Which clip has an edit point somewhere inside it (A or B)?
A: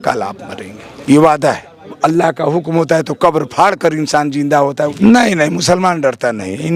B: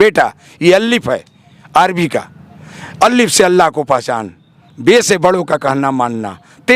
A